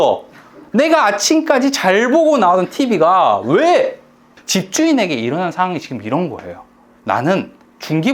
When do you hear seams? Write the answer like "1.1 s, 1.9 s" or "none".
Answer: 4.3 s